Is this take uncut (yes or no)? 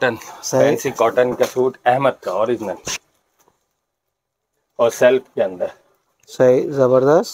yes